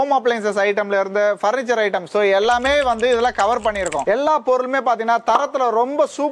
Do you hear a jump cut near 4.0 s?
yes; 1 cut; at 4.0 s

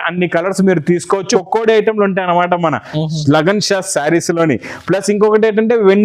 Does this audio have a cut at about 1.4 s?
yes; 1 cut; at 1.4 s

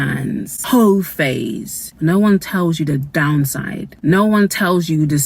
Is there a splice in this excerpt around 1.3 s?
no; 1 cut; at 3.1 s

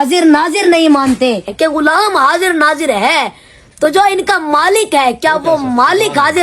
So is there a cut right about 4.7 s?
no; 1 cut; at 1.5 s

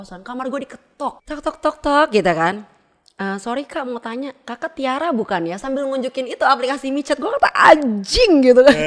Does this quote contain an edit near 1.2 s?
yes; 1 cut; at 1.2 s

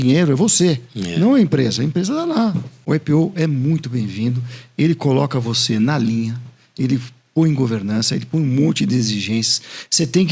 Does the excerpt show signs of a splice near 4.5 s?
no; 1 cut; at 2.7 s

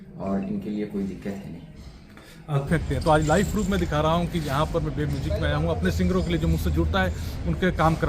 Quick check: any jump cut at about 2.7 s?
yes; 1 cut; at 2.7 s

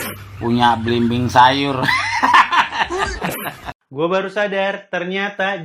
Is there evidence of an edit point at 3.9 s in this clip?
yes; 1 cut; at 3.9 s

